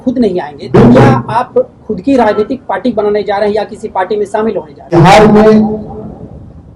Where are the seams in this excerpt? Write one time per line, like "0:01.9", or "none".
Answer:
0:04.9